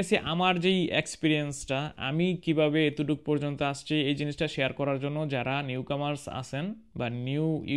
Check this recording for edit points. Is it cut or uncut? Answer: uncut